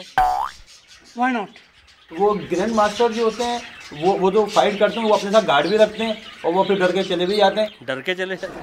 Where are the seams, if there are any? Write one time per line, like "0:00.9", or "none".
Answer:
none